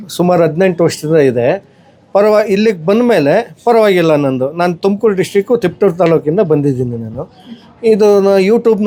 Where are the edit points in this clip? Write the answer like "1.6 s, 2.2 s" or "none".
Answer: none